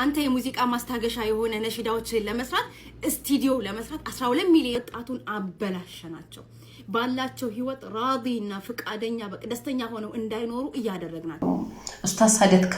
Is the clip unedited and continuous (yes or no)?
no